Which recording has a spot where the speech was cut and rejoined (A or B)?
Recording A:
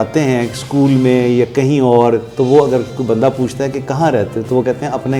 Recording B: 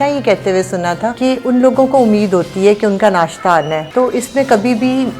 B